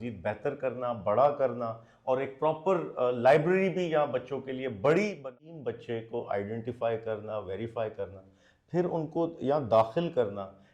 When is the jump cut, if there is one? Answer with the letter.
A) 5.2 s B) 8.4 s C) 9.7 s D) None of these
A